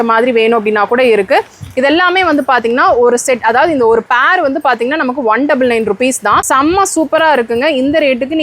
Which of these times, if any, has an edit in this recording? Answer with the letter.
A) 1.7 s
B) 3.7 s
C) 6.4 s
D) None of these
C